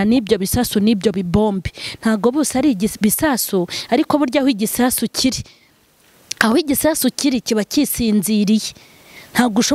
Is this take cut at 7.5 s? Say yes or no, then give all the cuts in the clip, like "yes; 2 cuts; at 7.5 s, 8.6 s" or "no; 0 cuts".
no; 0 cuts